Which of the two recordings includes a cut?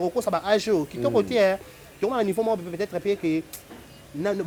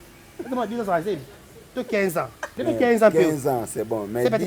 second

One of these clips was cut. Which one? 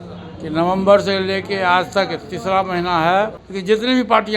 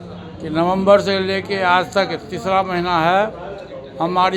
first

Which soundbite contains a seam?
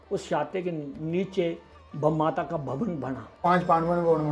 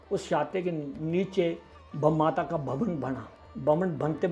first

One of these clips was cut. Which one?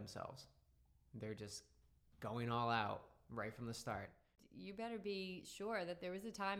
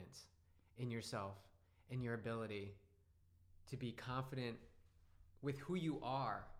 first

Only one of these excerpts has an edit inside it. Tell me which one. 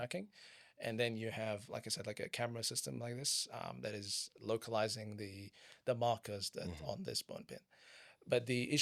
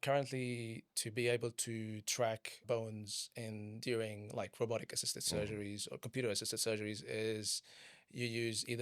second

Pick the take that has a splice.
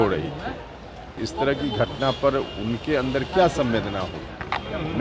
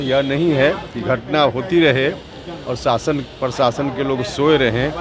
first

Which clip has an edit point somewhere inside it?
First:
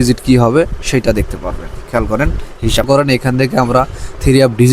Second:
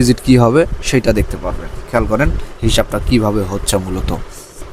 first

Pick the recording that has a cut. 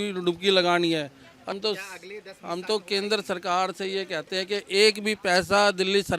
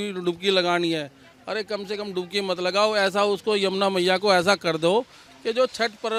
first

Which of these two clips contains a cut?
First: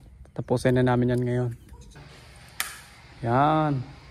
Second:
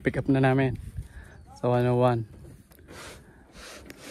first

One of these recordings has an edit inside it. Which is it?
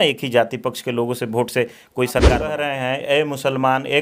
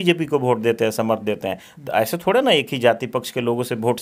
first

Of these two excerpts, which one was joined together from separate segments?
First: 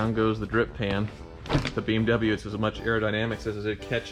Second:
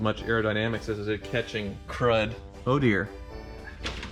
second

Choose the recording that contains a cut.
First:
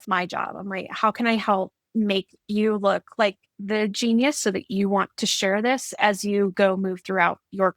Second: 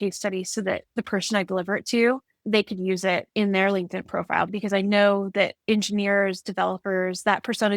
second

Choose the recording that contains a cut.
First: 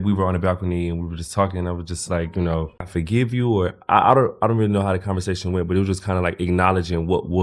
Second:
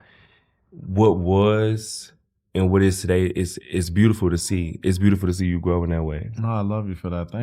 first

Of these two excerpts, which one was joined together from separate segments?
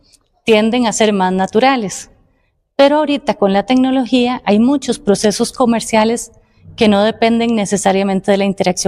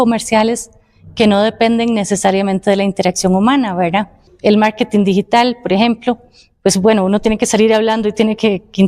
second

